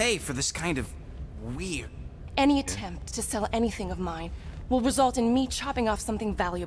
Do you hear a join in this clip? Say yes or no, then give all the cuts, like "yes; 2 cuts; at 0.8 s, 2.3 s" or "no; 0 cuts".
yes; 1 cut; at 2.1 s